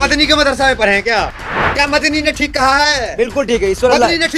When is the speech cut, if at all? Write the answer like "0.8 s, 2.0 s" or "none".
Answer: 1.3 s